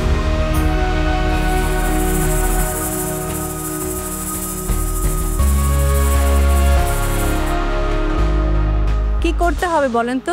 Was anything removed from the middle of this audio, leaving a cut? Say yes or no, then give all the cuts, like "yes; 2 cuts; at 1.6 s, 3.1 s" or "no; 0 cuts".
no; 0 cuts